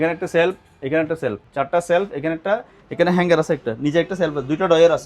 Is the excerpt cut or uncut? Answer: cut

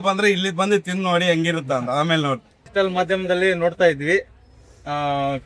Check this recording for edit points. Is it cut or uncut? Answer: cut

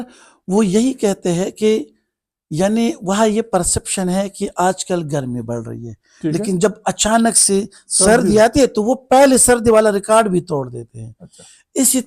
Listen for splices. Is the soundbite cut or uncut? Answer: uncut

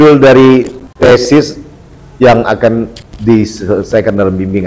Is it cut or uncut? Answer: cut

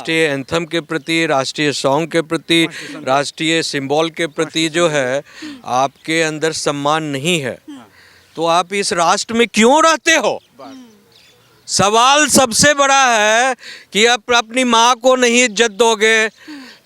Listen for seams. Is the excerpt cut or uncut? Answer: uncut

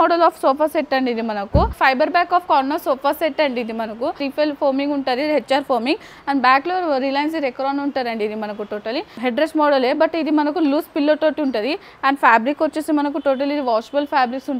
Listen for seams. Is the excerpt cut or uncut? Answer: cut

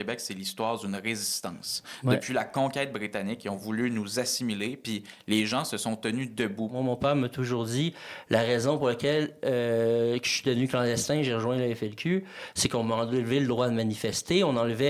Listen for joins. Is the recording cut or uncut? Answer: cut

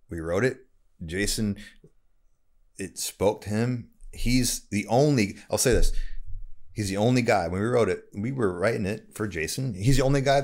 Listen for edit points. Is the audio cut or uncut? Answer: uncut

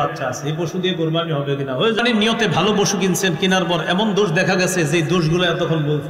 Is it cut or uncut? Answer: cut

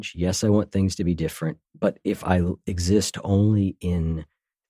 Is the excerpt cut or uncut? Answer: uncut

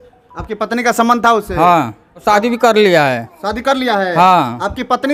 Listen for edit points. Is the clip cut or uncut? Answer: cut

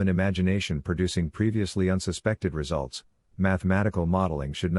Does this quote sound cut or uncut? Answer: uncut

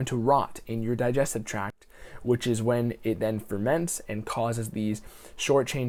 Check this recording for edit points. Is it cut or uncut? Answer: uncut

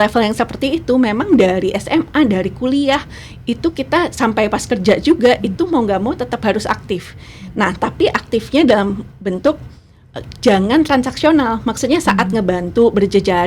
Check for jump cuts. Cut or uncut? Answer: uncut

